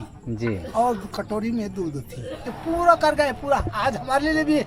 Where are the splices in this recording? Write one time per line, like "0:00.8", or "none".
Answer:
0:02.5